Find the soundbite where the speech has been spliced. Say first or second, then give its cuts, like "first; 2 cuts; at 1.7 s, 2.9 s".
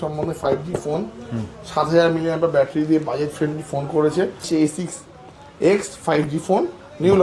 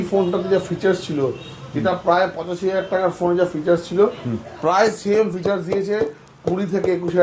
first; 1 cut; at 4.4 s